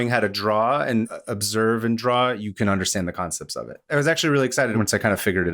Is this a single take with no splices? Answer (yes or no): no